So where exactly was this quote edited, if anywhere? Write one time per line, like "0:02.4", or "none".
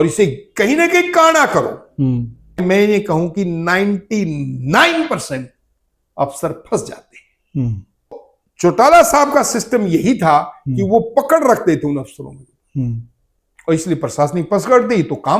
0:02.6
0:08.2